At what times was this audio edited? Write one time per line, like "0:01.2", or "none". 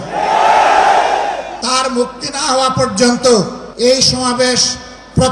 0:01.5
0:03.6